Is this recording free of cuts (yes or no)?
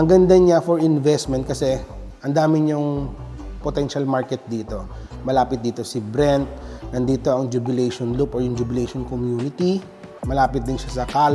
yes